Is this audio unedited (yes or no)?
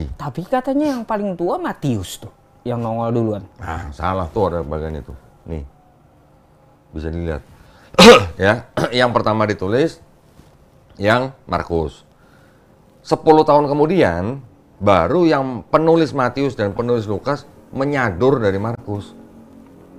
yes